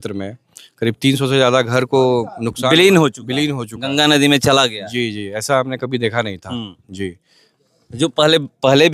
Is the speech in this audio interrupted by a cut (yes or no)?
no